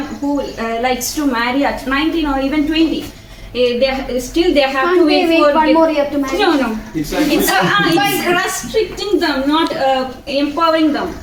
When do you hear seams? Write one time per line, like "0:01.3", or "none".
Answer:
none